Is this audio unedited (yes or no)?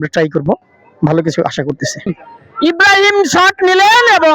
no